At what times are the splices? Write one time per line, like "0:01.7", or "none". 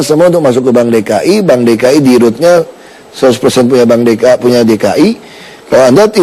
0:01.2